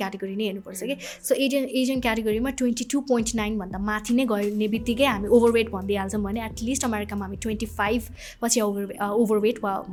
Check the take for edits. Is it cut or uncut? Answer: uncut